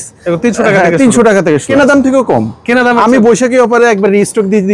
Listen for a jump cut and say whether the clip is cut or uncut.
cut